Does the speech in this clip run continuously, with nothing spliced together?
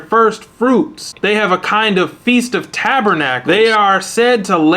no; 2 cuts; at 1.0 s, 3.4 s

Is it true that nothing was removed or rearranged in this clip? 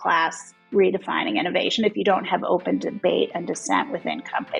yes; 0 cuts

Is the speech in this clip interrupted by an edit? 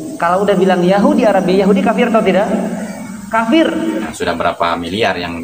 yes; 1 cut; at 4.1 s

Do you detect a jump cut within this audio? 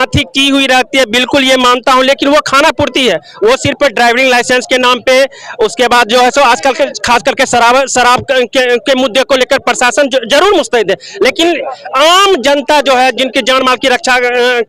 no; 0 cuts

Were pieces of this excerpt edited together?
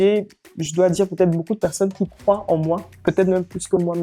no; 0 cuts

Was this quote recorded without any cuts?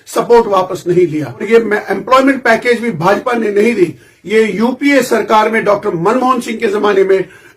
no; 1 cut; at 1.4 s

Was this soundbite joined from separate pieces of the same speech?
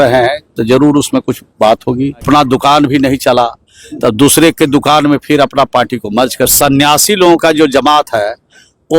yes; 2 cuts; at 2.2 s, 6.5 s

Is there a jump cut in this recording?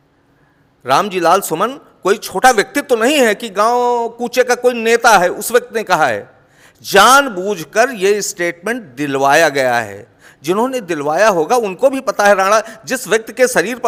no; 0 cuts

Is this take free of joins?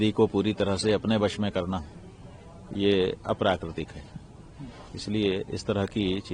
yes; 0 cuts

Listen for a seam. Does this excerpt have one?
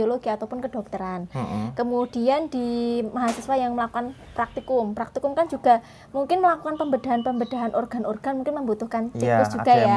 no; 0 cuts

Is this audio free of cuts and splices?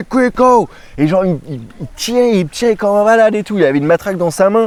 yes; 0 cuts

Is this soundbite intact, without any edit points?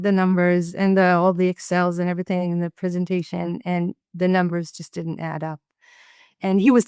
yes; 0 cuts

